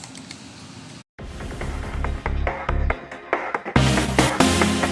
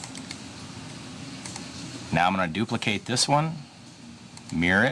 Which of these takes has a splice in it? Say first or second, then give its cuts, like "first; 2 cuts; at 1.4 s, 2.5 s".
second; 1 cut; at 1.1 s